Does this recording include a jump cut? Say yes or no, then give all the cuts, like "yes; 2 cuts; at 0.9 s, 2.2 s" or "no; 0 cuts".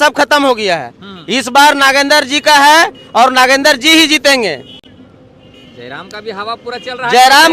no; 0 cuts